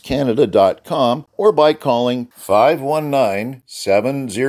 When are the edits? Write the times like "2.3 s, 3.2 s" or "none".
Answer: 1.3 s